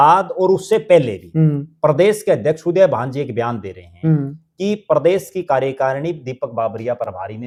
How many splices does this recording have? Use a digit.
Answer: 0